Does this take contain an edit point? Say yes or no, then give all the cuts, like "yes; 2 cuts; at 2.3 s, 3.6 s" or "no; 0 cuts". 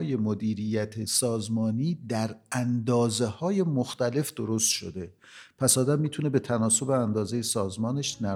yes; 1 cut; at 1.1 s